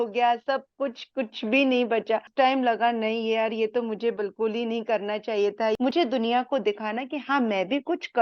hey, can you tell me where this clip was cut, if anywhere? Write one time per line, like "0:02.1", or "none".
0:02.3
0:05.9